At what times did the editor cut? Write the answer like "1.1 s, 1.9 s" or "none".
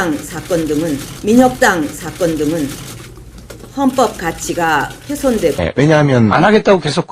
none